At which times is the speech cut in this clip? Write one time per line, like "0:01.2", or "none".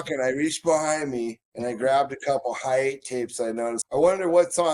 0:01.4
0:03.8